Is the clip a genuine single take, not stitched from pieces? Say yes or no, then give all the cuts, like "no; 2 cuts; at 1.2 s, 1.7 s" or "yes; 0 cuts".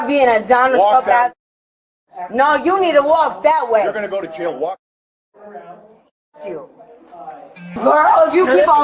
no; 1 cut; at 7.8 s